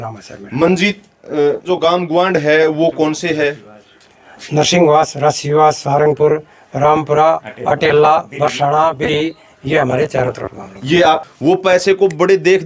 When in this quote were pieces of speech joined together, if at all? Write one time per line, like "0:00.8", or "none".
0:01.7
0:11.3